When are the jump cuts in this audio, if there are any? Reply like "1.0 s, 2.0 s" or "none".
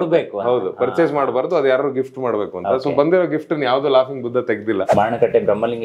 4.9 s